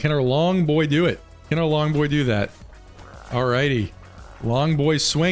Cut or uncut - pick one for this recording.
uncut